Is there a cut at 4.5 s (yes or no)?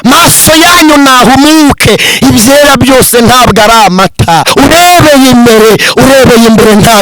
yes